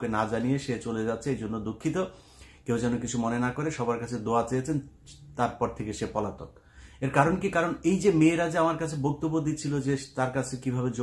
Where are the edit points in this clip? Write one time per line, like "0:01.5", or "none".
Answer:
none